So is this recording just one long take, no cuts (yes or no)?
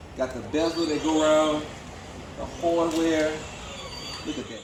yes